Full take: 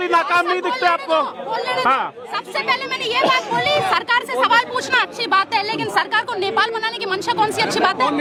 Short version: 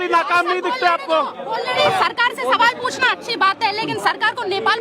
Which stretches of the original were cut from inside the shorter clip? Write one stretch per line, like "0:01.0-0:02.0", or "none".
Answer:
0:01.8-0:03.7